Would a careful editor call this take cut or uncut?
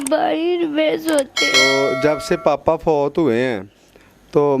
cut